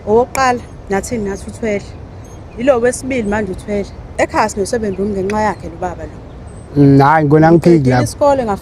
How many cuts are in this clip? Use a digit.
1